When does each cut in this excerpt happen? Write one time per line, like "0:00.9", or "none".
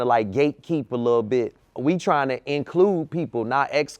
0:01.6